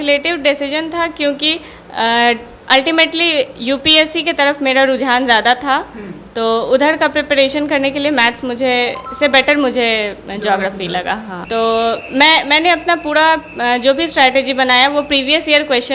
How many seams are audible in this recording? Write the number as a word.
one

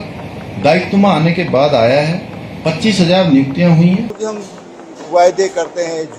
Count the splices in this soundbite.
one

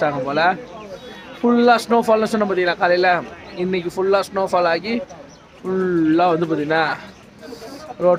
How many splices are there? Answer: zero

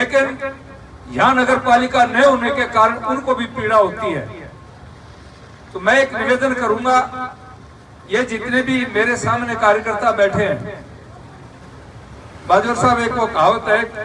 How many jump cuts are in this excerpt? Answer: zero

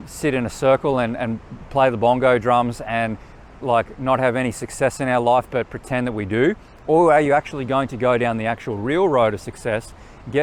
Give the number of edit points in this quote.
zero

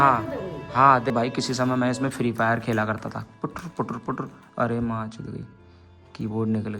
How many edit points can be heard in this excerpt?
one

